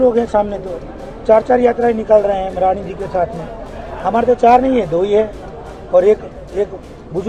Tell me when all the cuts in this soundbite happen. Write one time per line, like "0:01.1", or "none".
none